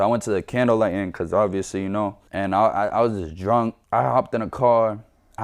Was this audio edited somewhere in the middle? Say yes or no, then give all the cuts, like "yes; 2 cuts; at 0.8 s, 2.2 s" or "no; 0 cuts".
yes; 1 cut; at 3.8 s